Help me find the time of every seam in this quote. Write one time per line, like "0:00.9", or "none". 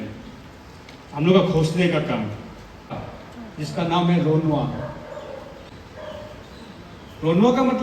0:03.0
0:05.7